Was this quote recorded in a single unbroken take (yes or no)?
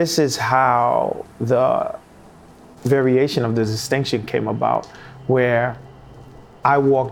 yes